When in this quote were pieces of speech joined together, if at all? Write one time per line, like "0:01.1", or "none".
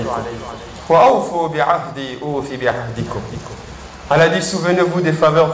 none